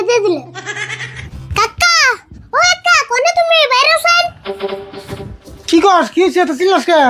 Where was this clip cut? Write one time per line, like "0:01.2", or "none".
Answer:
0:01.2